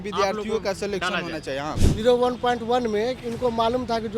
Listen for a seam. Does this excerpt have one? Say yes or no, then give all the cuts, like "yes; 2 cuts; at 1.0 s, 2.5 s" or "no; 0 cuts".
yes; 1 cut; at 1.8 s